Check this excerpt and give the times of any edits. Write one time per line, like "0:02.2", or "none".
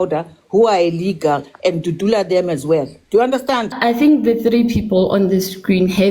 0:03.7